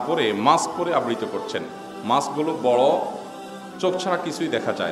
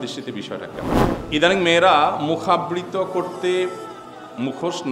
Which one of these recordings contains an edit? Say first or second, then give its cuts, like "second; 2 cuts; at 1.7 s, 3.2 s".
second; 1 cut; at 1.1 s